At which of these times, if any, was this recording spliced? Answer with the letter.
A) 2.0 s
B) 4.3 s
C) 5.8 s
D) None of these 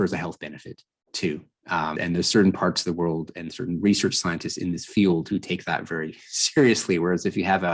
A